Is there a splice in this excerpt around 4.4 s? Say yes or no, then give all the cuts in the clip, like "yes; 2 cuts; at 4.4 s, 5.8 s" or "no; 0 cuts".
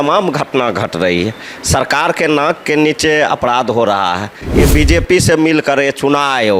yes; 1 cut; at 4.4 s